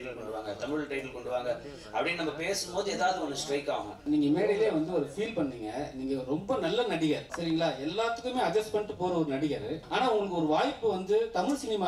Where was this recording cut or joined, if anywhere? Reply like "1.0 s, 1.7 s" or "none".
4.0 s, 7.3 s, 9.8 s